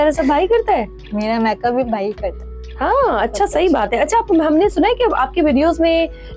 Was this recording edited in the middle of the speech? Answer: no; 0 cuts

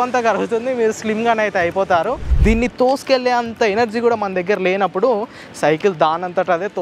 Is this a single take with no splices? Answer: no; 1 cut; at 2.3 s

